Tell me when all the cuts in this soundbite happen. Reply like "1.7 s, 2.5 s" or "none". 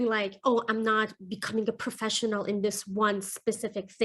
none